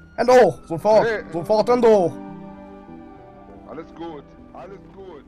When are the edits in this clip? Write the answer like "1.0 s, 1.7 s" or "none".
none